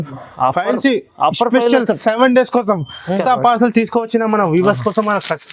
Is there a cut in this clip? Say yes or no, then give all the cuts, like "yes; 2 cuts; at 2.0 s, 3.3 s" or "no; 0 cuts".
yes; 1 cut; at 3.2 s